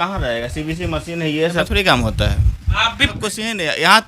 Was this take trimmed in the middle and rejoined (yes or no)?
yes